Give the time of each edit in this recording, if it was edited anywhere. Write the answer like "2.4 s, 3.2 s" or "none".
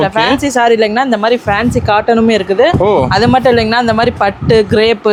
none